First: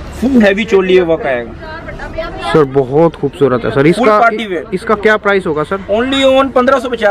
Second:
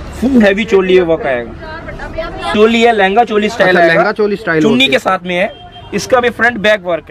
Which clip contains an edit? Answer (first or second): second